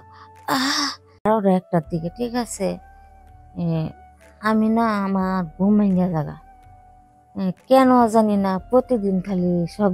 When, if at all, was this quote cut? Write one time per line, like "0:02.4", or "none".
0:01.2